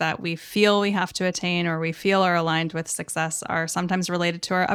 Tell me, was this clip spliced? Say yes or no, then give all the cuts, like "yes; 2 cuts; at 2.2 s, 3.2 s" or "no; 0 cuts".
no; 0 cuts